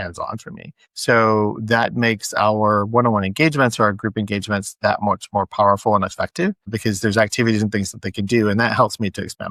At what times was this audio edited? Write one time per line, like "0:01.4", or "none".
none